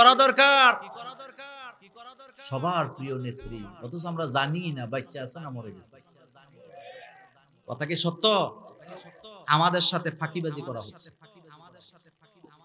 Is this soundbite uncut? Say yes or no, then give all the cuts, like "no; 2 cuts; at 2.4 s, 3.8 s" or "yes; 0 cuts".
yes; 0 cuts